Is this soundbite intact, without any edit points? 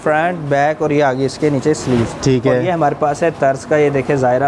yes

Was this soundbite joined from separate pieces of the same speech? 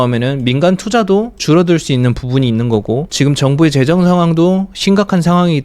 yes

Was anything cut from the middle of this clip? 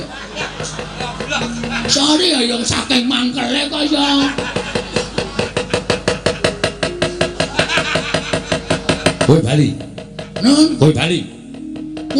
yes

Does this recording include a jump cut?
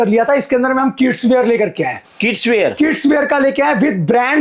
no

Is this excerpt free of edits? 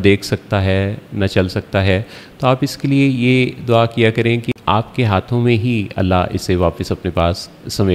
no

